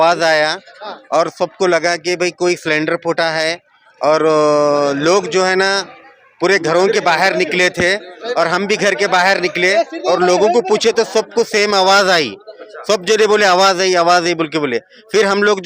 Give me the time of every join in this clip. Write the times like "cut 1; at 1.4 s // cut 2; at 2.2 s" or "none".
none